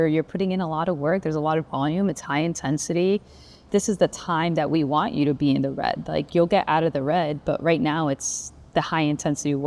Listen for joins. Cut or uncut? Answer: cut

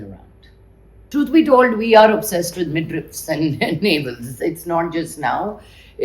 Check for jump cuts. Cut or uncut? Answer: cut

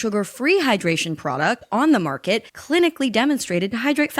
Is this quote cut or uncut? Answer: uncut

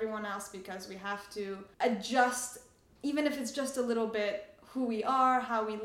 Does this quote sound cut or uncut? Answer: cut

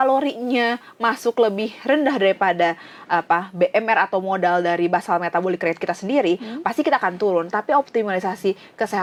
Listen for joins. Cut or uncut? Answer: uncut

